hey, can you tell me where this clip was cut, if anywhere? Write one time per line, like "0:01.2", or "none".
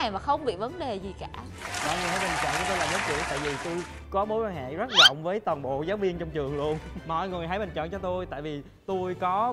0:06.9